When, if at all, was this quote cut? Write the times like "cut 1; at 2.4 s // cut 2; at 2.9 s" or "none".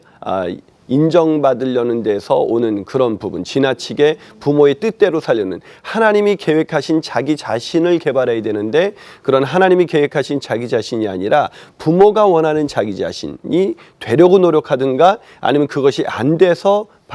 none

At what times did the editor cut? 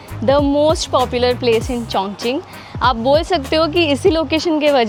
none

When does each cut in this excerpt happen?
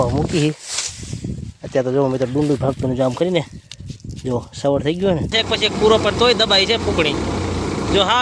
cut 1; at 5.3 s

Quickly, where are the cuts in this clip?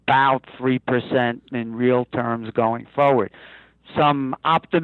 none

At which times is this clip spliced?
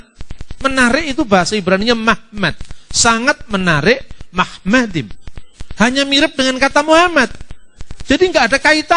none

